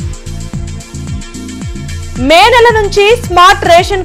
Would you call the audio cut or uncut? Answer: uncut